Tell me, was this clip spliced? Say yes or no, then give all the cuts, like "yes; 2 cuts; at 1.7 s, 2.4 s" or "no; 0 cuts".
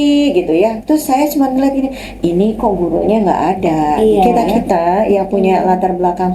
yes; 1 cut; at 4.5 s